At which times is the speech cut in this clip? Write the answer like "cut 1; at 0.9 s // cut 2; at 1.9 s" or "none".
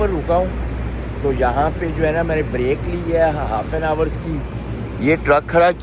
none